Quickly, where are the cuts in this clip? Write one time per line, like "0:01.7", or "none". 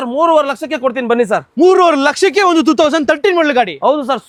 none